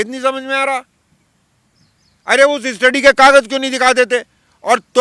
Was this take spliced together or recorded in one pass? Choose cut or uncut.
uncut